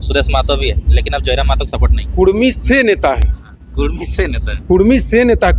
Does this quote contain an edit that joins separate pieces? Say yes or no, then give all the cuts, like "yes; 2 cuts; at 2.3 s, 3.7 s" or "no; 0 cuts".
no; 0 cuts